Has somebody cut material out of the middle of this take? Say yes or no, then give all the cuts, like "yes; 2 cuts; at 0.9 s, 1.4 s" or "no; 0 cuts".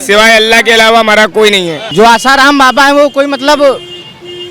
yes; 1 cut; at 1.8 s